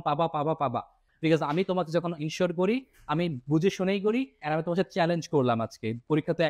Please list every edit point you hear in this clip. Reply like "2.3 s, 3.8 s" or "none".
1.0 s